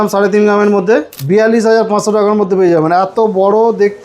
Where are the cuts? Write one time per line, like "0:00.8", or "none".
0:01.1